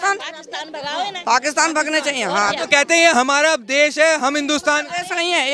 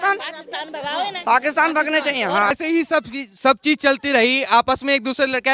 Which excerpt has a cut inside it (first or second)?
second